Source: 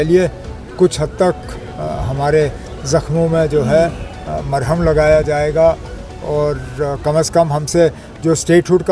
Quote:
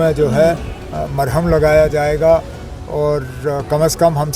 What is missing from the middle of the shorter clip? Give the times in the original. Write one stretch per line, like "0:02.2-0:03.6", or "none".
none